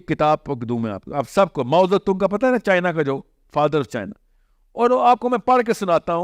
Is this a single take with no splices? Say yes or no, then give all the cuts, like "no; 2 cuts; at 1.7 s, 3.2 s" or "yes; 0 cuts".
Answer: yes; 0 cuts